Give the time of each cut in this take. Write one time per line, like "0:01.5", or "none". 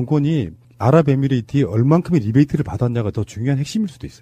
0:02.2